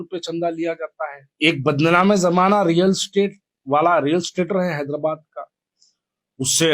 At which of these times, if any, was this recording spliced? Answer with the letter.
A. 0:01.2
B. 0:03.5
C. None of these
A